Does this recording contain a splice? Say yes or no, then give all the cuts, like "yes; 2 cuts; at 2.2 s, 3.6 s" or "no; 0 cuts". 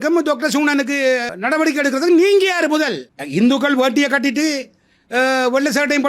yes; 2 cuts; at 1.3 s, 3.1 s